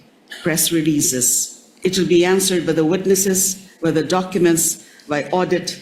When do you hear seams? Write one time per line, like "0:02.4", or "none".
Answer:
none